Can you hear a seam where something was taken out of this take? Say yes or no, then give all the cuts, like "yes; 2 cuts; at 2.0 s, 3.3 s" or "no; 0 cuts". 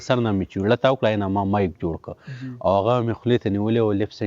no; 0 cuts